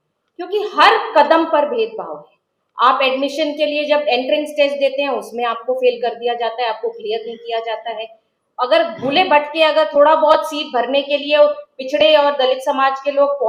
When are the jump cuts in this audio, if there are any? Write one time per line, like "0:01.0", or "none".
none